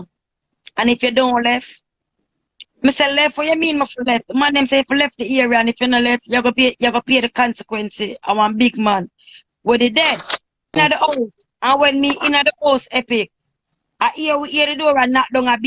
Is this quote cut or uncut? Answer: cut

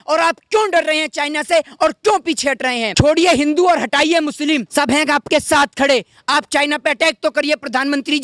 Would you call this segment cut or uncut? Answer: cut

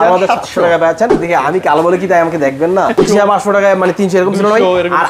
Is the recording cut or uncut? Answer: cut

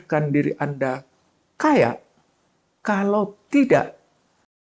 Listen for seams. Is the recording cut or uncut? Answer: uncut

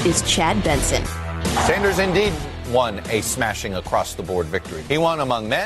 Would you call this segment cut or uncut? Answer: cut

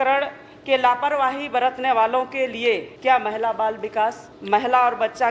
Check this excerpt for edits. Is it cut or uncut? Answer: cut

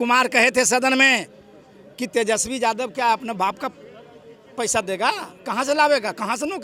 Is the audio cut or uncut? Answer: uncut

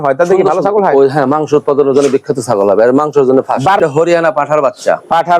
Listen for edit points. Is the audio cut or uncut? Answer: cut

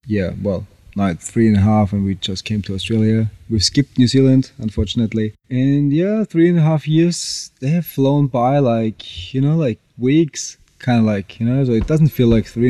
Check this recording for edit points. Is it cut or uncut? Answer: uncut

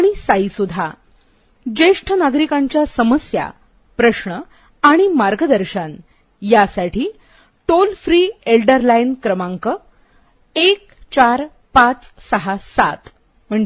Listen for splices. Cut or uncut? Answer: uncut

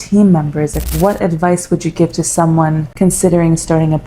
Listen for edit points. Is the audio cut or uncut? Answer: cut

